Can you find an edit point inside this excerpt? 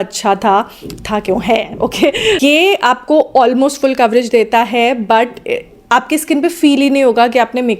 no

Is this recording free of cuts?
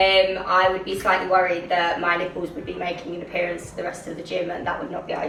yes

